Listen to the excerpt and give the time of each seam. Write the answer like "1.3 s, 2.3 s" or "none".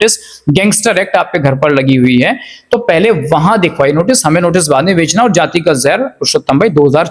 none